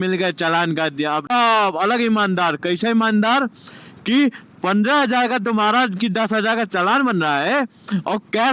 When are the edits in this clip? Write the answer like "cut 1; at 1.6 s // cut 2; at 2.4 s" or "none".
cut 1; at 1.3 s

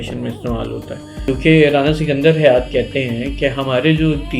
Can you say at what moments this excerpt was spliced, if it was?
cut 1; at 1.2 s

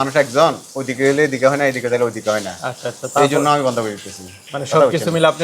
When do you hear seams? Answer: none

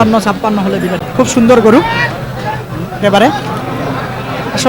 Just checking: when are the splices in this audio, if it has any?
cut 1; at 1.0 s

